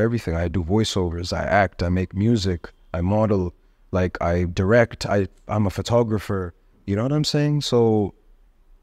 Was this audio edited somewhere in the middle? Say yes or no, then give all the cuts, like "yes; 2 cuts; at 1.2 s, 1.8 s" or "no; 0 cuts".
no; 0 cuts